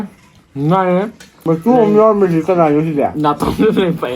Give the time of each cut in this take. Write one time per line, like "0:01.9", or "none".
0:01.3